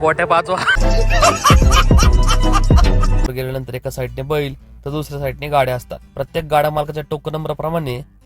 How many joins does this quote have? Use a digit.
1